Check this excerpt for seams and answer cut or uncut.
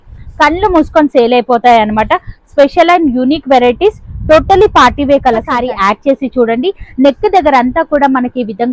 cut